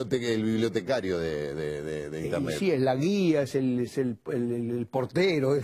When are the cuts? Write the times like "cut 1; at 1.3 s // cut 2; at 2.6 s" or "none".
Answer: cut 1; at 4.2 s